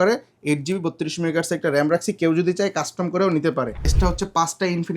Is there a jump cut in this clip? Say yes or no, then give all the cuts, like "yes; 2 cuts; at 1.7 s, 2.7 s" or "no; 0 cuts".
yes; 1 cut; at 3.9 s